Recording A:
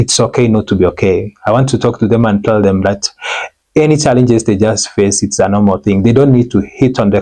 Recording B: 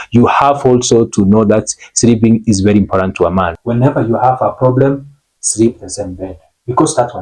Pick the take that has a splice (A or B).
B